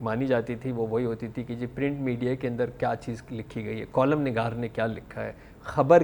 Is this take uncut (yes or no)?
yes